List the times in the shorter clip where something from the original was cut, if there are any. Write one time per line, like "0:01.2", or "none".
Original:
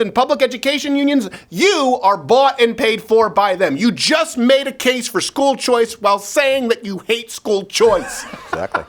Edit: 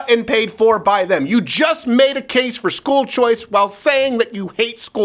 none